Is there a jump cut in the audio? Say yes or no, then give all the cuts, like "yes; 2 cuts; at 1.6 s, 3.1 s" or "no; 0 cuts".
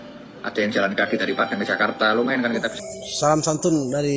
yes; 1 cut; at 2.7 s